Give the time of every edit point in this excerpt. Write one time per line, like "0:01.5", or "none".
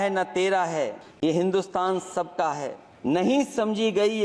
0:01.0
0:02.8